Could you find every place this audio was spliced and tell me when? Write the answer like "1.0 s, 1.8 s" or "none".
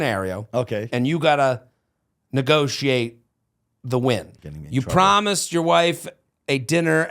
4.3 s

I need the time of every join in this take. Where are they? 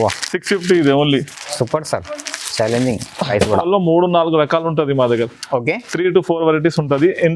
3.6 s

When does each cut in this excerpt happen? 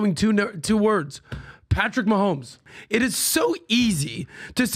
2.7 s

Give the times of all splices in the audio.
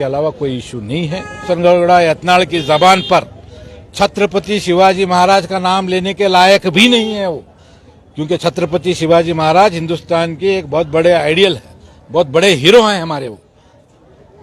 1.4 s

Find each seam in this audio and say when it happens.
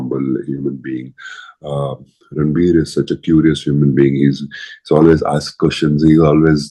none

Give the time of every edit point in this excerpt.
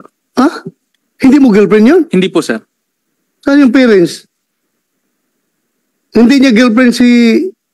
none

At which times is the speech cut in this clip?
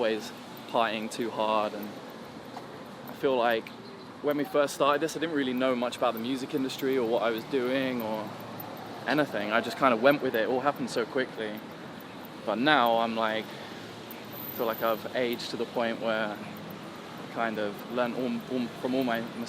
none

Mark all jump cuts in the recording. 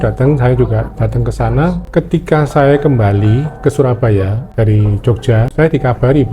1.8 s, 4.4 s, 5.5 s

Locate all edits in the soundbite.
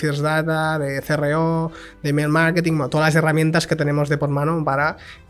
none

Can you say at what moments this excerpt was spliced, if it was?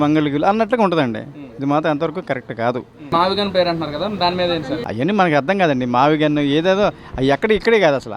3.0 s

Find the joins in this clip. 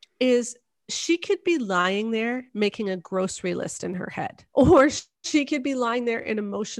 4.4 s

